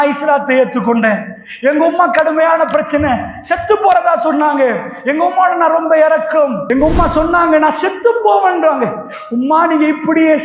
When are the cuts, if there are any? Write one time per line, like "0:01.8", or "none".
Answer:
0:06.6